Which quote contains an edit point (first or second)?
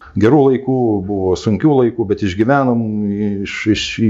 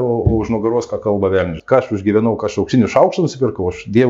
second